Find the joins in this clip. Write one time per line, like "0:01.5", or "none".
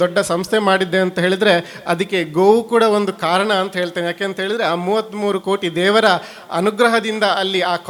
none